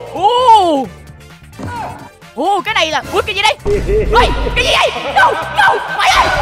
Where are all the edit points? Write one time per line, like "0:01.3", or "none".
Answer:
none